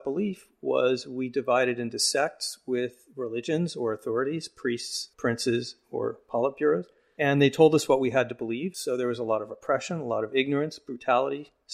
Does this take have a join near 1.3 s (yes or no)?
no